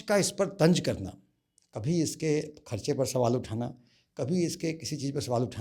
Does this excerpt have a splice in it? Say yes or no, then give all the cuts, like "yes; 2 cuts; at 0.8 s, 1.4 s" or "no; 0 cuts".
no; 0 cuts